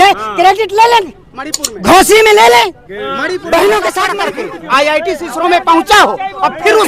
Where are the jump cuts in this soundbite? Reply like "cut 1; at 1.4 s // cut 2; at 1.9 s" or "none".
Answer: cut 1; at 4.1 s